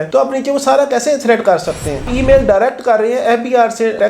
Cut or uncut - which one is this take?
cut